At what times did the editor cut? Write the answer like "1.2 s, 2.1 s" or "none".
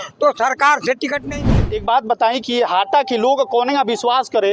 1.4 s